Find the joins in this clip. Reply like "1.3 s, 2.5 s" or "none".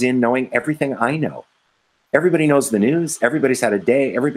none

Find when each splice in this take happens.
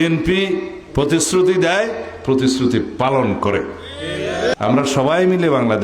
4.5 s

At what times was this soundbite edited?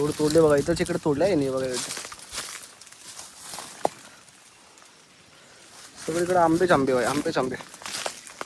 none

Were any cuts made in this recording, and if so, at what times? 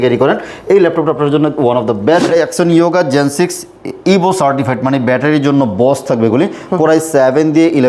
2.2 s

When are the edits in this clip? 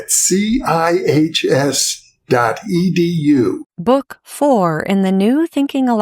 3.7 s

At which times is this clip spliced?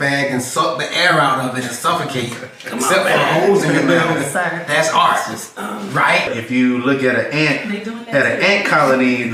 6.3 s

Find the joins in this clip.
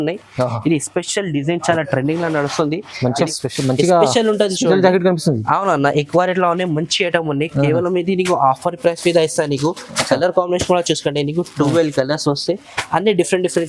3.3 s

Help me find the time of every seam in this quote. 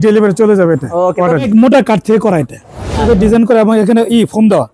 1.5 s, 3.0 s

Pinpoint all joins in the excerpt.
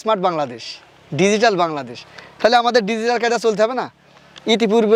none

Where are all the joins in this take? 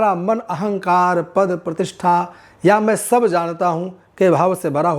none

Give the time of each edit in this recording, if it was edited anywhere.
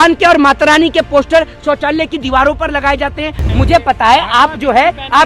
3.5 s

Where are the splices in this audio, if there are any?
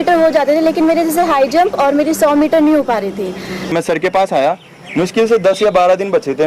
3.7 s

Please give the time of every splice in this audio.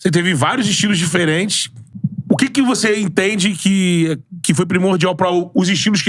none

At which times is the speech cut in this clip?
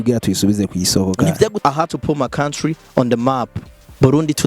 1.5 s

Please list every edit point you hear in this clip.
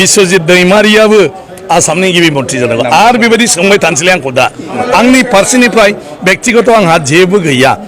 4.8 s

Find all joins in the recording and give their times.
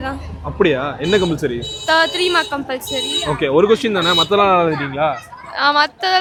none

